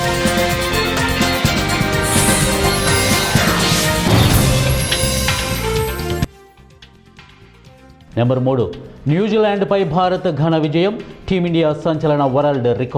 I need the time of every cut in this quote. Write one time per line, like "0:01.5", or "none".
none